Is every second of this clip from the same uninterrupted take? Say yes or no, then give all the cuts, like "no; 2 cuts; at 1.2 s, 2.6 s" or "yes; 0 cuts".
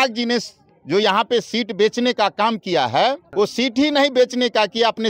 no; 1 cut; at 3.3 s